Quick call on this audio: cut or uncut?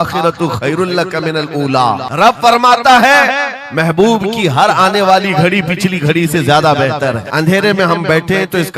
cut